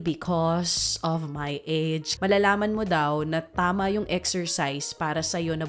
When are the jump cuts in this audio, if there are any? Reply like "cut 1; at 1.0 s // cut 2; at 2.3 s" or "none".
cut 1; at 2.1 s